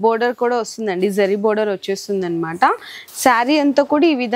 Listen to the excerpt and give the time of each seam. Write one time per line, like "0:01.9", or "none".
0:02.9